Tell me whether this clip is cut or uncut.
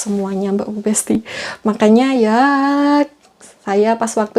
uncut